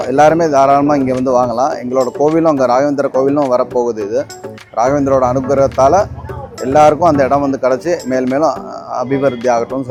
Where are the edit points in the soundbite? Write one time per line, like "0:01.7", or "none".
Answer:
none

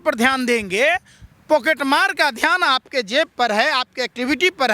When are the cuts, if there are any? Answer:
none

